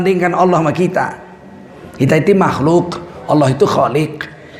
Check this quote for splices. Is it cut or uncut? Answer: uncut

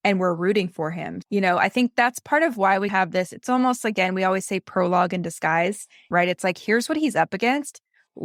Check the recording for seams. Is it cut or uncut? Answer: uncut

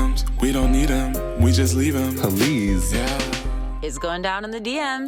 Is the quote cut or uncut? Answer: uncut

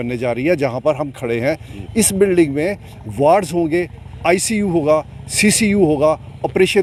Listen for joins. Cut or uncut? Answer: uncut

